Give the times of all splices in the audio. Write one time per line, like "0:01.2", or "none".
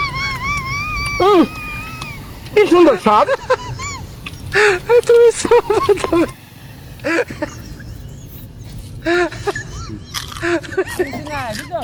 none